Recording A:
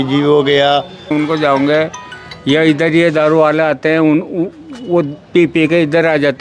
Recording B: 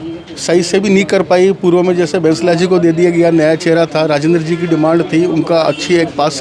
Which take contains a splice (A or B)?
A